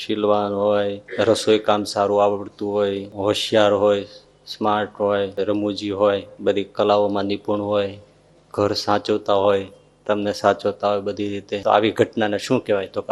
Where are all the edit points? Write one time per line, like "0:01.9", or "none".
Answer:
0:01.0
0:03.1
0:05.3
0:06.3
0:11.6